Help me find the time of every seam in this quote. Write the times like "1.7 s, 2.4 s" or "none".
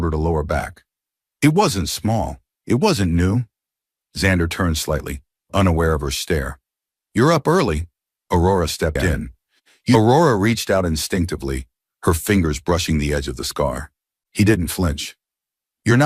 10.0 s